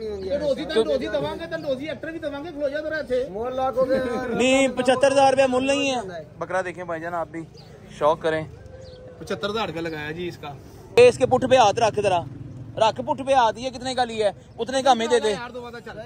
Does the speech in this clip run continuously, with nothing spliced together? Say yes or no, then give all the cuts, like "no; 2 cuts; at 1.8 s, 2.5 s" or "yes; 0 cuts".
no; 1 cut; at 11.0 s